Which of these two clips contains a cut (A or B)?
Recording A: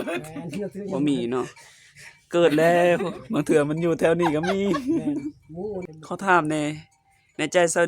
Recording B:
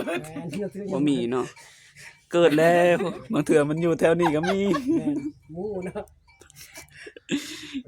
A